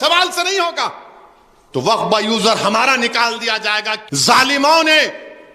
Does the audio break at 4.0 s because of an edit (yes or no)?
yes